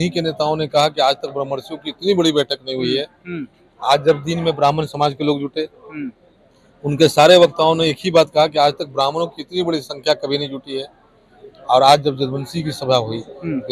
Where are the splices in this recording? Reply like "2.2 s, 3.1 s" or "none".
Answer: none